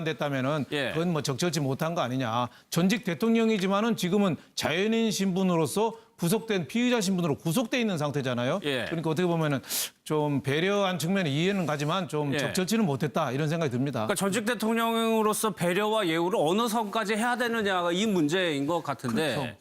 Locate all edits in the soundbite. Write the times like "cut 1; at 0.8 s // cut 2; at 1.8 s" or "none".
cut 1; at 5.8 s